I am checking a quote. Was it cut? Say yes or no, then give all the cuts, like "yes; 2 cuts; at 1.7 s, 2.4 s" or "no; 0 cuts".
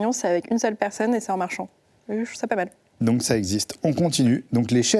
no; 0 cuts